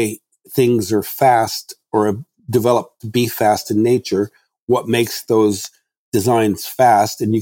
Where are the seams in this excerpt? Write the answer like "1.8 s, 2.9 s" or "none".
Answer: none